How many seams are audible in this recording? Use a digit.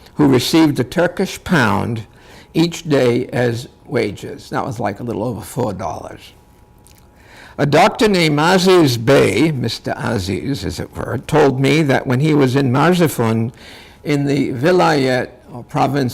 1